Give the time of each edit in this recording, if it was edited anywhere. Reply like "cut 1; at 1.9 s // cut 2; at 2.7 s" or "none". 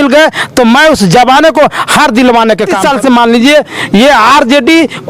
cut 1; at 2.8 s